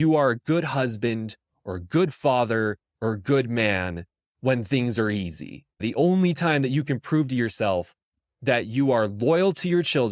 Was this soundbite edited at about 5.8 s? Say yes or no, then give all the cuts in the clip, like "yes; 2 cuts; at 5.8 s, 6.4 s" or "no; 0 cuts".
yes; 1 cut; at 5.8 s